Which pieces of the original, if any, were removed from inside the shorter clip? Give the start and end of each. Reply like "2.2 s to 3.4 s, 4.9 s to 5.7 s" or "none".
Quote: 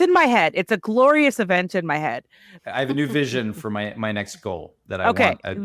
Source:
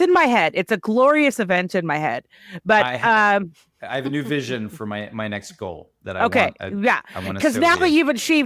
2.5 s to 3.6 s

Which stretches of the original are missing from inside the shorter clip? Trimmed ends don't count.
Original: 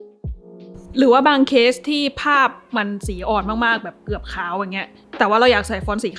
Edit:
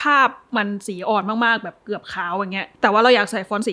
4.9 s to 5.0 s

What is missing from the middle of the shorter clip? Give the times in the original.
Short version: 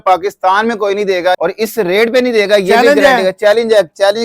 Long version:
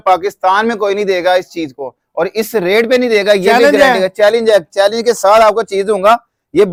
1.3 s to 2.1 s

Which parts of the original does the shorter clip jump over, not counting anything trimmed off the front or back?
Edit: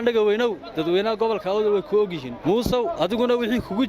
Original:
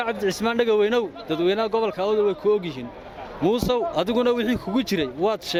2.8 s to 3.2 s

